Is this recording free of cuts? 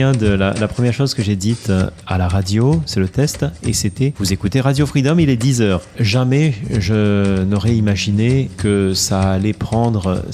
no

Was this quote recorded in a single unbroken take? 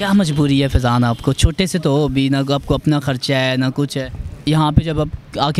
no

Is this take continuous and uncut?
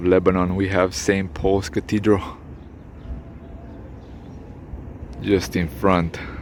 yes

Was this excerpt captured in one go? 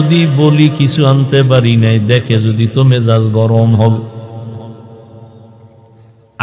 yes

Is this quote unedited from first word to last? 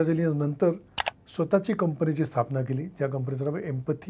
yes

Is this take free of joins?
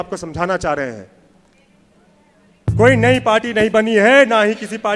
yes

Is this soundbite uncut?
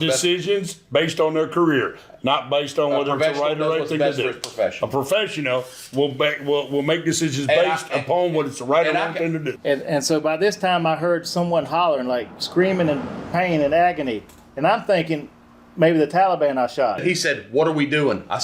no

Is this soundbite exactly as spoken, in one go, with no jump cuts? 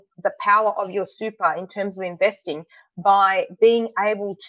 yes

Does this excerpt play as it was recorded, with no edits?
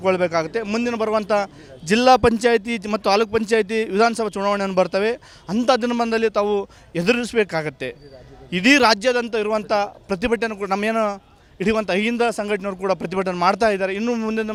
yes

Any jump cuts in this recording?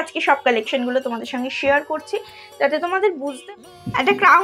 yes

